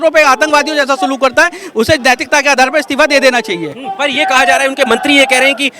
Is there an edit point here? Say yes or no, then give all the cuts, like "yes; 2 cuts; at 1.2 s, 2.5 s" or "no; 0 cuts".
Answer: no; 0 cuts